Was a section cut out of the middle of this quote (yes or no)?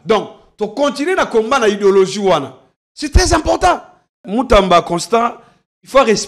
yes